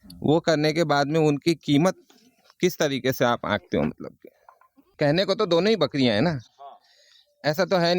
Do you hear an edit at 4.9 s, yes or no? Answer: yes